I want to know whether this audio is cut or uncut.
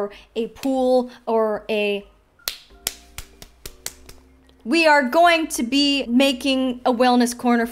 cut